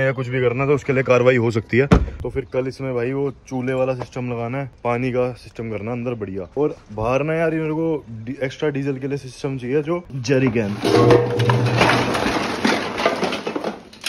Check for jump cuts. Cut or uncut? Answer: cut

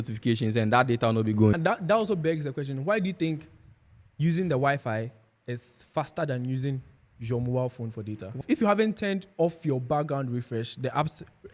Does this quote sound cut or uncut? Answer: cut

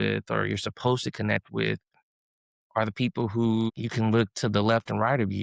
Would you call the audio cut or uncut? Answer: cut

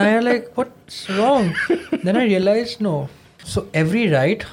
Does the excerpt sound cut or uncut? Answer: cut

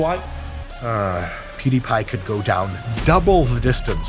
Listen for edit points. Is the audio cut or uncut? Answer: cut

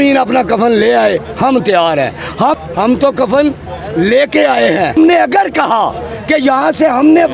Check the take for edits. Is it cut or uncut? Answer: cut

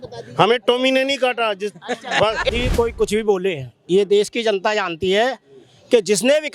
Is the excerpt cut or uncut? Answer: cut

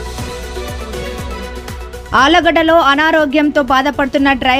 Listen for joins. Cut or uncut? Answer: cut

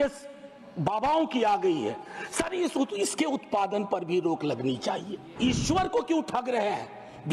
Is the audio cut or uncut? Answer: cut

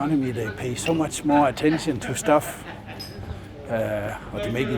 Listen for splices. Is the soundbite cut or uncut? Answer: uncut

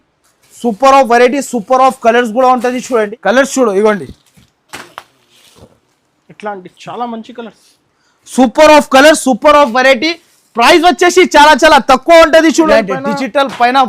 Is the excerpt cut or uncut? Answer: cut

